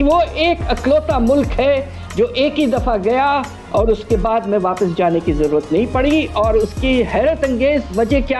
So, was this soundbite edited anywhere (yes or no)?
no